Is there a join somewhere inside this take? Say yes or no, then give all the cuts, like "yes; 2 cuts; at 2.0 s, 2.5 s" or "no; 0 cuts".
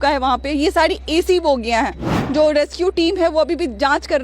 yes; 1 cut; at 2.1 s